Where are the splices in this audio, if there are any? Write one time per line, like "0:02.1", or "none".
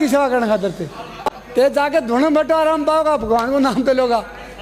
none